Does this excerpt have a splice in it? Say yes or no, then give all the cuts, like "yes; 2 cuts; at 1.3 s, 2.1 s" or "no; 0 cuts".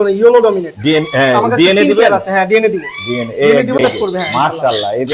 yes; 1 cut; at 3.8 s